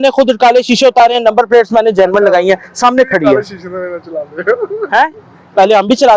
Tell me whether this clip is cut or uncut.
uncut